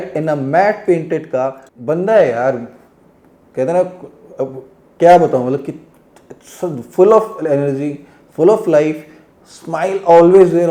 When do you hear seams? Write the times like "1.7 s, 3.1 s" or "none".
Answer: 1.7 s